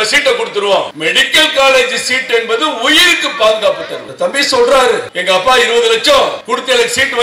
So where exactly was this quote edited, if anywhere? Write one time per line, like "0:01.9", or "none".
0:00.9
0:04.0
0:05.1
0:06.4